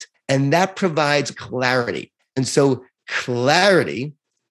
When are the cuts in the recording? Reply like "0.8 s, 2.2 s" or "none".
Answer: 1.4 s